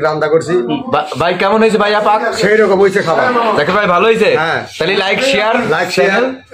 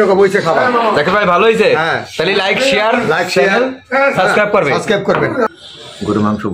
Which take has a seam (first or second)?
second